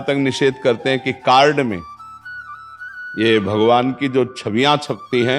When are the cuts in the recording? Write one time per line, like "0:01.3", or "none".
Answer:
none